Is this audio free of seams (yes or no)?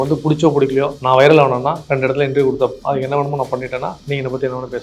no